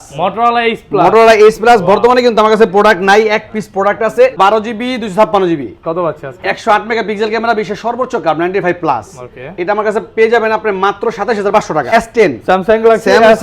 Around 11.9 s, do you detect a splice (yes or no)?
yes